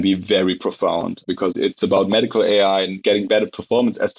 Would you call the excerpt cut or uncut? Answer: cut